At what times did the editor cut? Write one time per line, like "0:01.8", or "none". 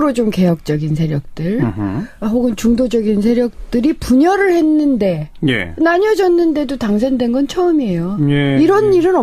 0:04.3